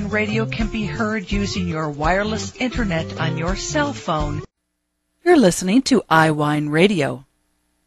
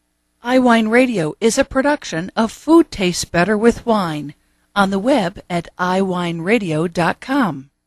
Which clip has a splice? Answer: first; 1 cut; at 6.2 s

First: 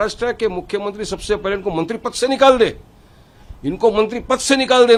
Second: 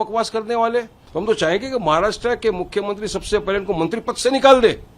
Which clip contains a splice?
second; 1 cut; at 1.0 s

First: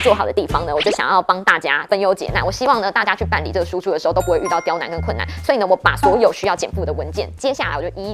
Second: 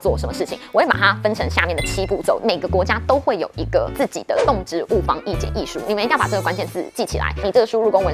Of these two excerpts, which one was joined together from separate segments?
second; 2 cuts; at 2.4 s, 7.4 s

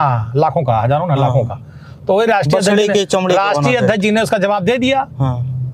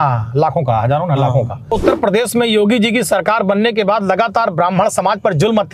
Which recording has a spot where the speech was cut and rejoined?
second; 1 cut; at 1.7 s

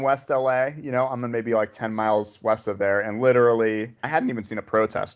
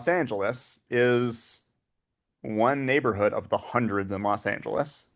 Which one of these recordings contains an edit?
first; 1 cut; at 4.0 s

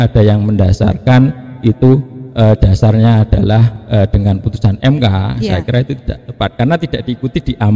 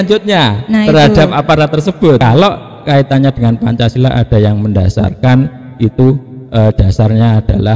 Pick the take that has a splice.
second; 1 cut; at 2.2 s

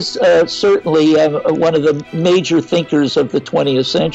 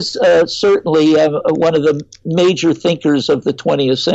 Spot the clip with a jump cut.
first; 1 cut; at 2.1 s

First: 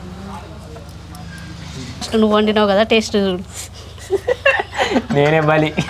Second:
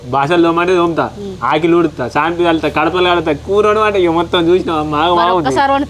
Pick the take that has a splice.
first; 1 cut; at 2.1 s

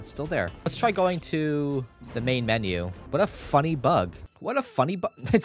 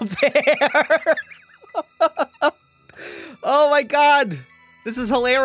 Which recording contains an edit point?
first; 4 cuts; at 0.7 s, 2.0 s, 3.0 s, 4.3 s

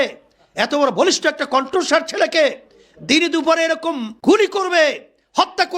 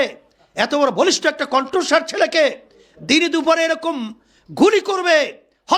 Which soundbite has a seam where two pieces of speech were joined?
first; 1 cut; at 4.1 s

